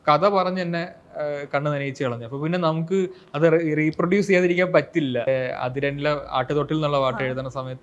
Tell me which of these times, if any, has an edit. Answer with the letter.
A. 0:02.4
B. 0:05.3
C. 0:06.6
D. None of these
B